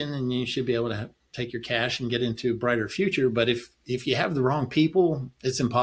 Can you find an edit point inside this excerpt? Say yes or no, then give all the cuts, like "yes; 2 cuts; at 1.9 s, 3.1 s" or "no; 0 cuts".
no; 0 cuts